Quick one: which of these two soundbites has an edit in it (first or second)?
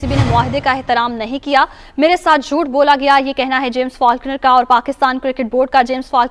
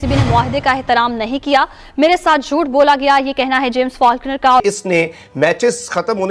second